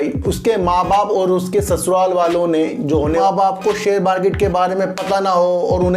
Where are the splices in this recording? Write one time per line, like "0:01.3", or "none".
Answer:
0:03.1